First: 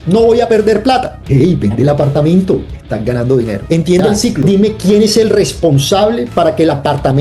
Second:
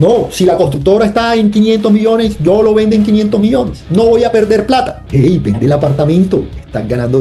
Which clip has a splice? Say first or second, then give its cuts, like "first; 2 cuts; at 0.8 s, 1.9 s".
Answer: first; 1 cut; at 4.4 s